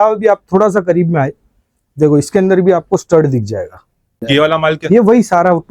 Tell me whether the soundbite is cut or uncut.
cut